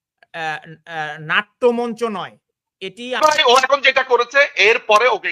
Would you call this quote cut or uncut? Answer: cut